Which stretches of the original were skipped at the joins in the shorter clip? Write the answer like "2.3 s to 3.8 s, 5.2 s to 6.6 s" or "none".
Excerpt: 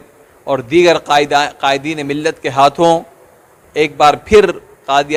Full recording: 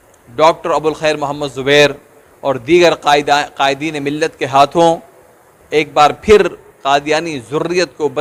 none